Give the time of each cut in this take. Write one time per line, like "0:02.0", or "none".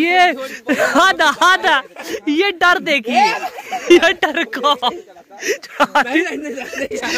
none